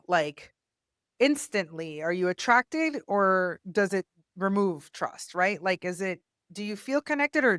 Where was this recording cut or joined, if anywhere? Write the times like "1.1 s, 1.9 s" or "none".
none